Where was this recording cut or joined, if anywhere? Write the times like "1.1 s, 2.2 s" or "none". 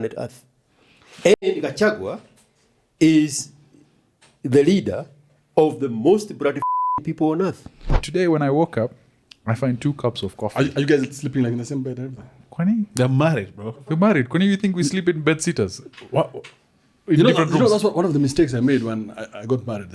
8.0 s